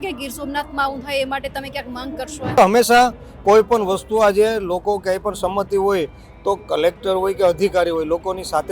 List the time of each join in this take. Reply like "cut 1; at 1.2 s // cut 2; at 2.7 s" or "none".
cut 1; at 2.6 s